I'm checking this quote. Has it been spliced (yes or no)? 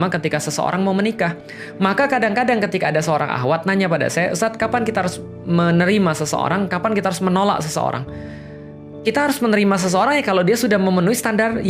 no